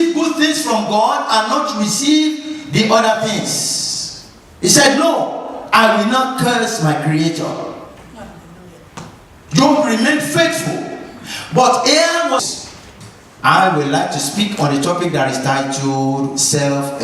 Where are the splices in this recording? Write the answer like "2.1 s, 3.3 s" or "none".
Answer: 12.4 s